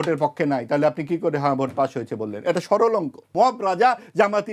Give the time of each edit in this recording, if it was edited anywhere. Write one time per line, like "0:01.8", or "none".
0:03.3